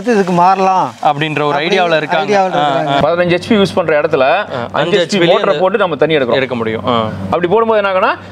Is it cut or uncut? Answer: cut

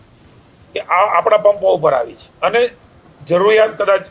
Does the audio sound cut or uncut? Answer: cut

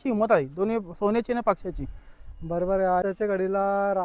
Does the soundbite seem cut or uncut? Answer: uncut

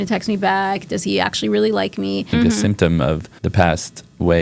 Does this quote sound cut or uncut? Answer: cut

